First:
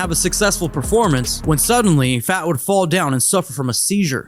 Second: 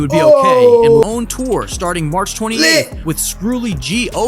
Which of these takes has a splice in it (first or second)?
second